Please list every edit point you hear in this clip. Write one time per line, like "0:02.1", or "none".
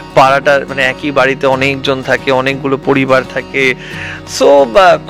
none